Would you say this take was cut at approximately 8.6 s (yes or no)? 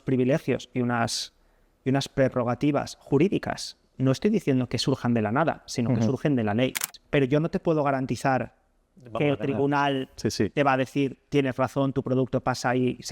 no